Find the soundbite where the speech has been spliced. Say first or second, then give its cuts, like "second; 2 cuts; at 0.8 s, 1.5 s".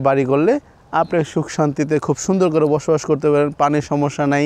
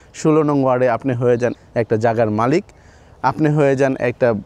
second; 1 cut; at 1.6 s